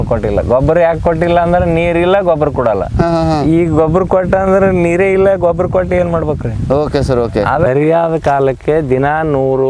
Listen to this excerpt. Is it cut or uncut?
uncut